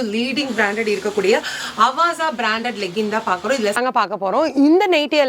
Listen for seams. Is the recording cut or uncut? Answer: cut